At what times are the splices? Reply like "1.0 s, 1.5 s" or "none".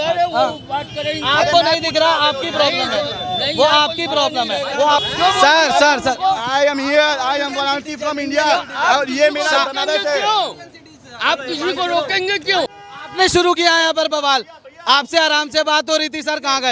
5.1 s, 12.7 s